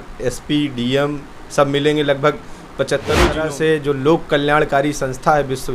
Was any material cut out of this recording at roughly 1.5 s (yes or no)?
no